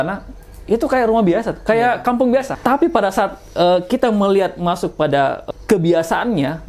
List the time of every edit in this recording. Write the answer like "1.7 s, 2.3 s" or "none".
2.5 s, 5.4 s